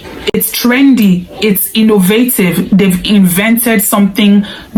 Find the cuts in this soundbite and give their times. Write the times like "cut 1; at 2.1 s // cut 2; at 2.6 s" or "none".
none